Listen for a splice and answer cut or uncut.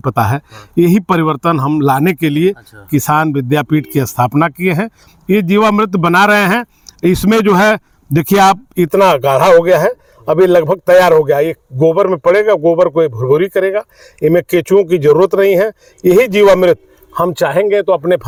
uncut